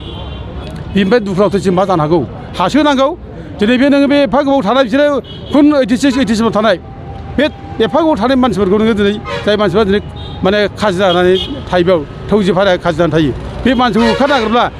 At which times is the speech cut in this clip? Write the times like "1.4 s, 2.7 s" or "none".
none